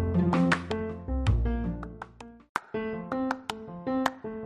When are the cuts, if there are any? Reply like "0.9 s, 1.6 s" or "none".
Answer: 2.3 s

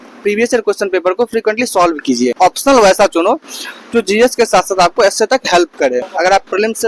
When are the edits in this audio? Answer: 2.3 s, 6.1 s

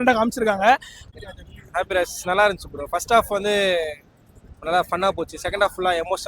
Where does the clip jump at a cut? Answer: 1.0 s

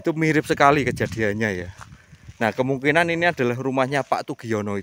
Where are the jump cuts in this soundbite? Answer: none

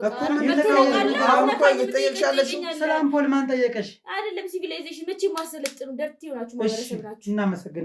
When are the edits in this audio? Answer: none

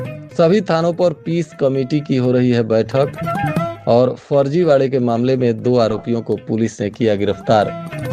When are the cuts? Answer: none

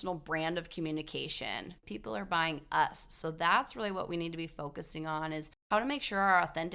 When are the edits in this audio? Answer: 1.7 s

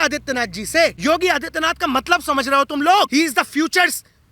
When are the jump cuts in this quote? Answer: 1.0 s, 3.1 s

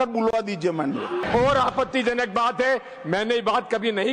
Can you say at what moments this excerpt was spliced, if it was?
1.2 s

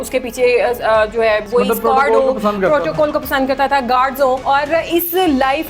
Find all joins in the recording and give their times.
1.4 s, 4.4 s

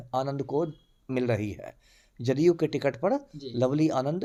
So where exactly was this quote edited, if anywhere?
none

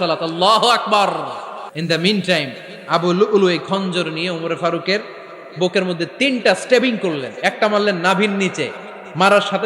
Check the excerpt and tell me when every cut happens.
1.7 s

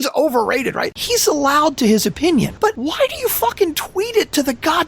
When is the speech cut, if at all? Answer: 1.0 s, 2.6 s

